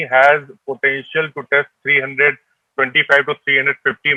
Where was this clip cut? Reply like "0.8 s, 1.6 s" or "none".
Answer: none